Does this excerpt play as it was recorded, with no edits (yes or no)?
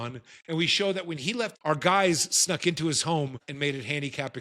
no